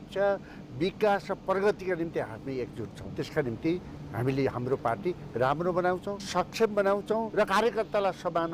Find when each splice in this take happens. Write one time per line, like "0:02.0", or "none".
0:03.0
0:06.1
0:07.5